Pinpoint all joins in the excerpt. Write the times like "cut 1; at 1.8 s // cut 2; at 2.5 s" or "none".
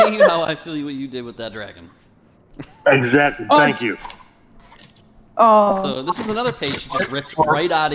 none